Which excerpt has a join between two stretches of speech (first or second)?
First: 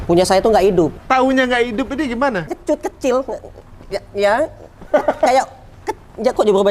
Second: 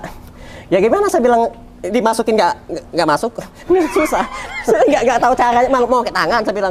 first